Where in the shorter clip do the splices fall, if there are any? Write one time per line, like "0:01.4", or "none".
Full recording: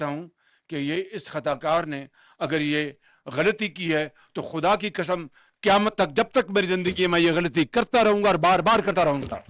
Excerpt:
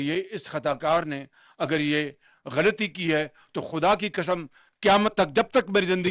none

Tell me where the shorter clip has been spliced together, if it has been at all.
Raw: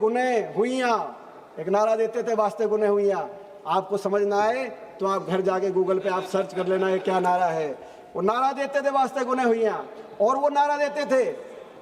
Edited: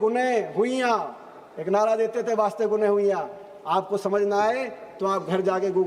none

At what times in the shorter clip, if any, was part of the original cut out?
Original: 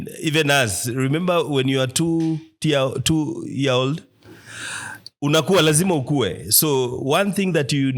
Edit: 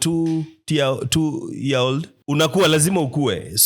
0:02.1

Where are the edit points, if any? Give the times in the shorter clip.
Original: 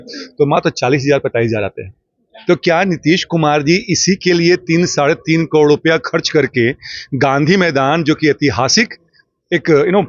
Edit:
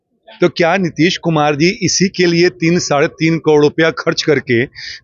none

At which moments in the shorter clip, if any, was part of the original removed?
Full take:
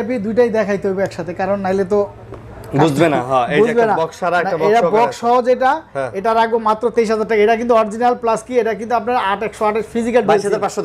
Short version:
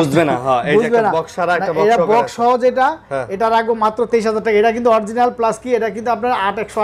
none

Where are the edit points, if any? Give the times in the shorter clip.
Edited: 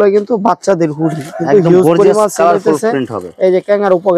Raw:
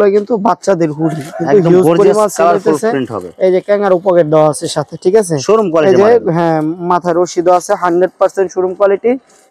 none

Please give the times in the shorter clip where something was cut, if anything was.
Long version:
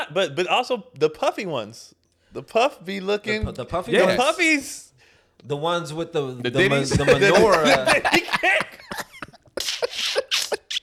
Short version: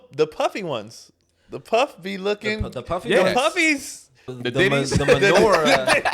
0:04.4

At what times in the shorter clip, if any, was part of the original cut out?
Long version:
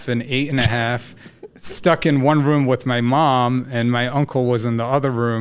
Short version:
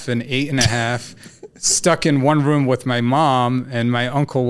none

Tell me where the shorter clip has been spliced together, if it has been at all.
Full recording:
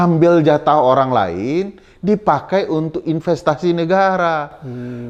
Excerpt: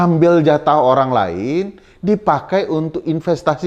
none

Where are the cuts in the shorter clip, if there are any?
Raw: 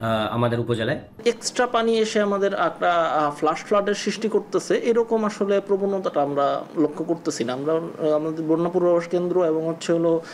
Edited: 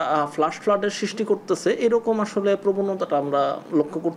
none

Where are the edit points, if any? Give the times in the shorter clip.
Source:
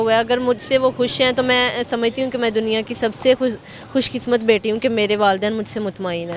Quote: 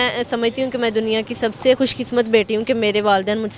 0:01.8

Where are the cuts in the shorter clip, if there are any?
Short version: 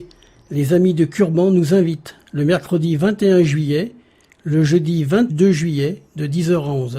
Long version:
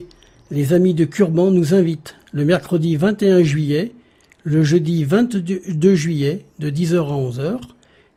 0:05.3

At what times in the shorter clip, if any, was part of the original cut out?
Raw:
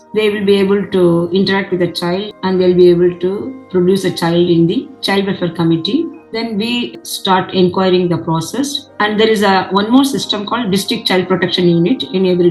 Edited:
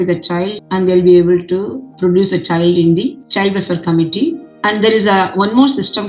0:04.5

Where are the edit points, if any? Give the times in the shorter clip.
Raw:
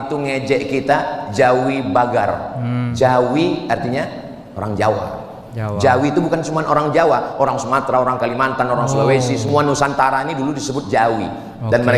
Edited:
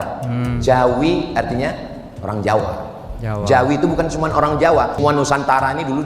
0:04.9

